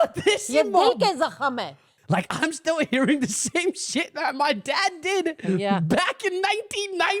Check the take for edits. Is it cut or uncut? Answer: cut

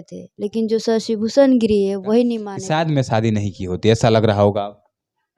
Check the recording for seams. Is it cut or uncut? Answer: cut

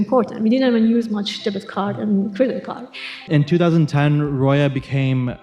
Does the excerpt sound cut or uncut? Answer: cut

